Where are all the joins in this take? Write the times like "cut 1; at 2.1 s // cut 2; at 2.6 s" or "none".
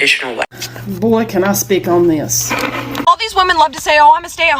cut 1; at 2.9 s